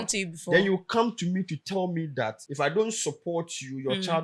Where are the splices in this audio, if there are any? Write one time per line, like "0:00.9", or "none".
0:02.4